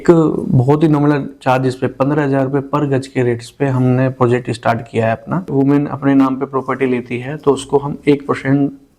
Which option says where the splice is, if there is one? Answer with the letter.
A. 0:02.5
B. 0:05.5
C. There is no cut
B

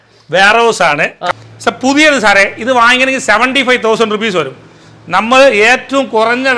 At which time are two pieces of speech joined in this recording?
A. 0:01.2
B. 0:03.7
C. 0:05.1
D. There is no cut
A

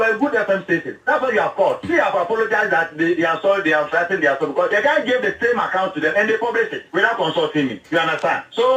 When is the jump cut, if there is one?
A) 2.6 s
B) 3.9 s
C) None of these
B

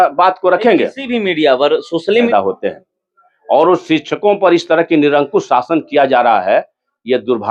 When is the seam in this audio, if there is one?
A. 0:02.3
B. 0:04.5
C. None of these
A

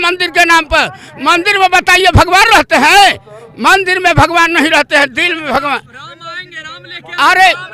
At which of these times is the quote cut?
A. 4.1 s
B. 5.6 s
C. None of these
C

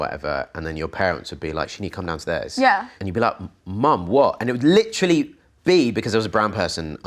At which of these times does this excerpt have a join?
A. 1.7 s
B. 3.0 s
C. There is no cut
B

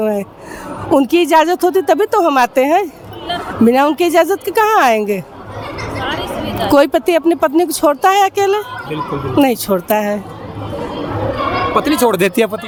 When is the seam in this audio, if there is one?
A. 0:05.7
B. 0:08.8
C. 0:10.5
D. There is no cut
D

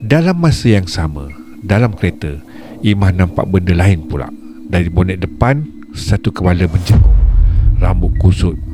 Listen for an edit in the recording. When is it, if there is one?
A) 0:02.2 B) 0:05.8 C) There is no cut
C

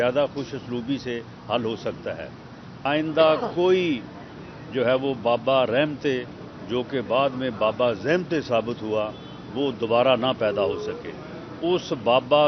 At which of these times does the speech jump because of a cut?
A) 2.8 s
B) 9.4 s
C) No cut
A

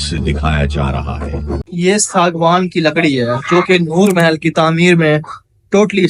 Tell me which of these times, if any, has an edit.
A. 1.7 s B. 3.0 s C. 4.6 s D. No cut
A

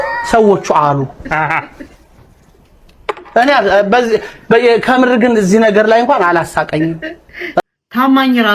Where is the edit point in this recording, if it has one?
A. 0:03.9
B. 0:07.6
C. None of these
B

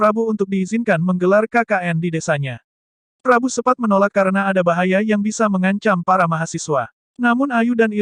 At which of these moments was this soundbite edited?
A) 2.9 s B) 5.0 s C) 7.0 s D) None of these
C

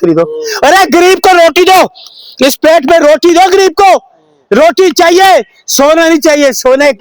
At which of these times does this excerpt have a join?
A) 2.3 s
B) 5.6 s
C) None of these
C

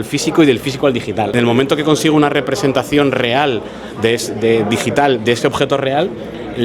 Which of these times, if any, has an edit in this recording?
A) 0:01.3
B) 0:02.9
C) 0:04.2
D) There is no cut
A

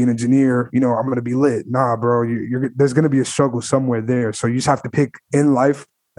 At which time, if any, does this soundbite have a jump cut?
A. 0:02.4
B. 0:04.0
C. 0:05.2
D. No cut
C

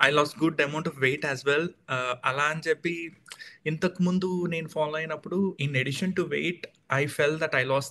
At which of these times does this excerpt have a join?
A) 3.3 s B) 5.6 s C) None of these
B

